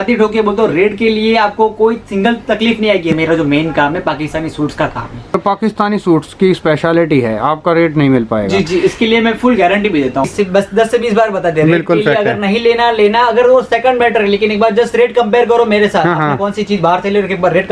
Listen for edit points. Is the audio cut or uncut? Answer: cut